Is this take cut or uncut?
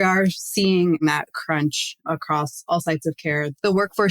cut